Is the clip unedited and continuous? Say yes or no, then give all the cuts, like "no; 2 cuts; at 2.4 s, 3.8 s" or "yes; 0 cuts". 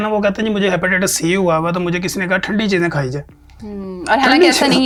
yes; 0 cuts